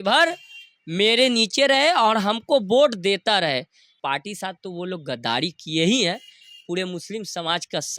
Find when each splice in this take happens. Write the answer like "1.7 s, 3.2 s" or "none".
3.9 s